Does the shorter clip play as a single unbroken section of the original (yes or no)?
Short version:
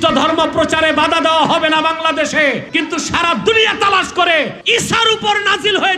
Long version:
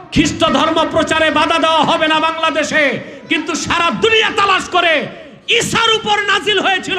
no